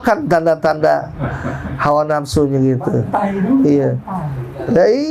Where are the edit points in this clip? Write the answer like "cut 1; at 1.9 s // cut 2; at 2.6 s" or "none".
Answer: none

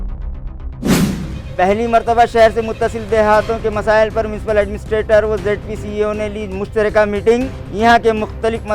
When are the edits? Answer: none

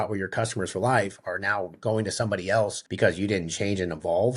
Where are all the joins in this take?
cut 1; at 2.8 s

